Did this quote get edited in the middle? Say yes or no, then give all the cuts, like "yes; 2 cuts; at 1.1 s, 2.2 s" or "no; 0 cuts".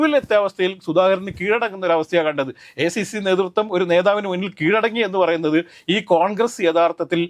no; 0 cuts